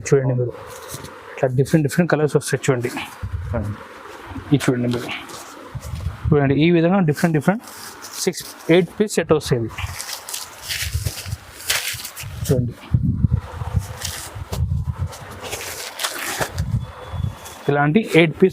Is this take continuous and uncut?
no; 1 cut; at 6.2 s

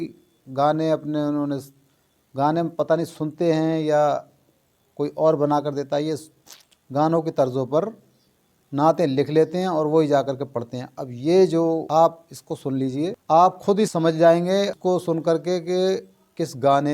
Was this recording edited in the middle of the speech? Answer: yes; 4 cuts; at 11.8 s, 13.2 s, 13.9 s, 14.8 s

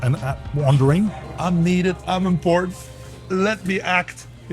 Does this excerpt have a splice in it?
yes; 1 cut; at 1.2 s

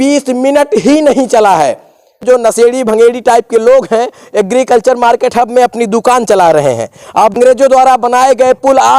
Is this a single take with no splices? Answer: no; 2 cuts; at 2.2 s, 7.4 s

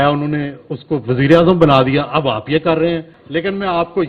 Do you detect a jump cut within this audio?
yes; 1 cut; at 3.2 s

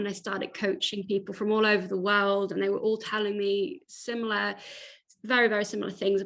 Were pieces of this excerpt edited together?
no; 0 cuts

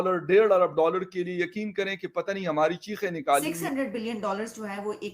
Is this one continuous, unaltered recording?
no; 1 cut; at 3.4 s

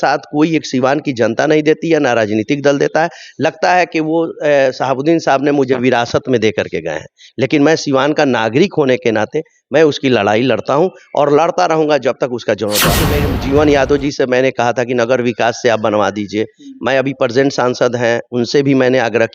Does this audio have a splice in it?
yes; 1 cut; at 13.1 s

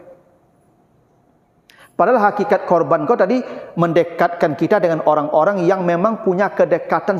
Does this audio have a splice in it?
no; 0 cuts

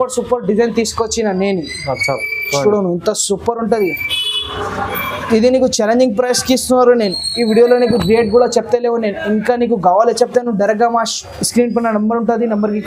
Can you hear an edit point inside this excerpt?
no; 0 cuts

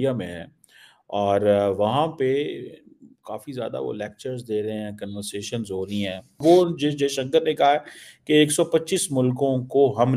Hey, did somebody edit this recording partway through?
yes; 1 cut; at 6.2 s

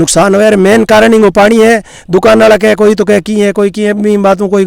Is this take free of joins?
yes; 0 cuts

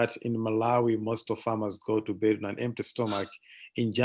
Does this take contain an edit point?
no; 0 cuts

